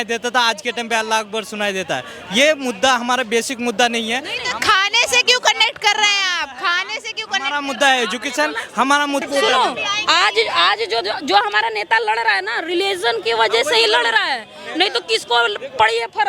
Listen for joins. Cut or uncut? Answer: cut